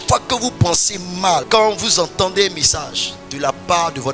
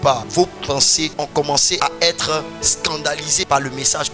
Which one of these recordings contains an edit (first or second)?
second